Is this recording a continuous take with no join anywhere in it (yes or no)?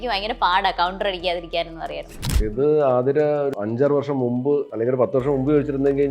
no